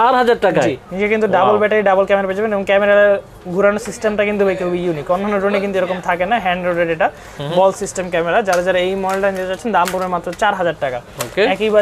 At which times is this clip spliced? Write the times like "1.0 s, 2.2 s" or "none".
none